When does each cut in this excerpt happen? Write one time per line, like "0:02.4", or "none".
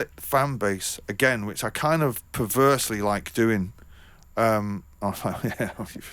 none